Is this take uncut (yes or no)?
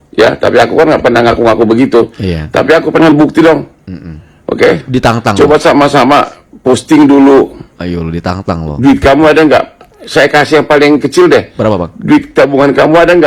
yes